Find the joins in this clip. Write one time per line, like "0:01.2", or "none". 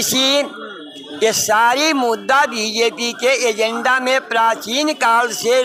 none